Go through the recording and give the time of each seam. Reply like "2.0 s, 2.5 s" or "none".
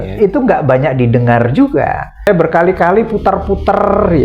2.3 s